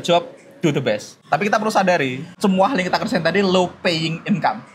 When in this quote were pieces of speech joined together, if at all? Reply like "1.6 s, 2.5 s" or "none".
1.1 s, 2.2 s